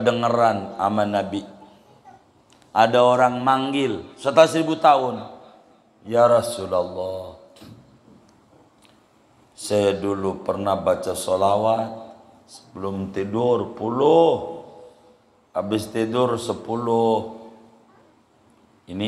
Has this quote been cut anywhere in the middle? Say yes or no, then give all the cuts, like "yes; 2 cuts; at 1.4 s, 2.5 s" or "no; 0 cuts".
no; 0 cuts